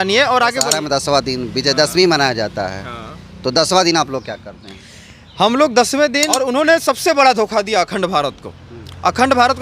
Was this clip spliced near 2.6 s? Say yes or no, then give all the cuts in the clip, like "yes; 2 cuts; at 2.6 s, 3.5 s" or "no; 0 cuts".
no; 2 cuts; at 0.8 s, 6.4 s